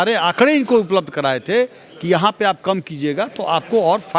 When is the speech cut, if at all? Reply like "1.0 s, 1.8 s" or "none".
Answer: none